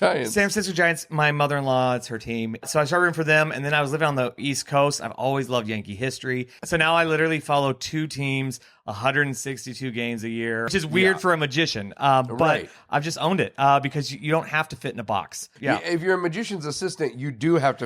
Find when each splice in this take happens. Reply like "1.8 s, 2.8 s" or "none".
2.7 s, 4.4 s, 6.5 s, 10.7 s, 15.5 s